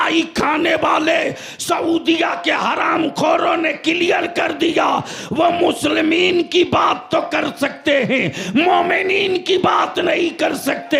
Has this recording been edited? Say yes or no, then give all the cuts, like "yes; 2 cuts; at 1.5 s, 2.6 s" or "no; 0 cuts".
no; 0 cuts